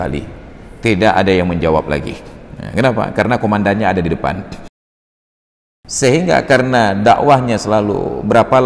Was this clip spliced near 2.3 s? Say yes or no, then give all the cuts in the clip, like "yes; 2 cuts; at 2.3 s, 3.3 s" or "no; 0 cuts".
no; 1 cut; at 5.2 s